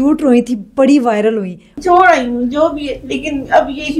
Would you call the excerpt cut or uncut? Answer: cut